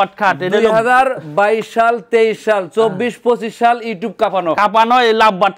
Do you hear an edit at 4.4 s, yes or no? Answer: no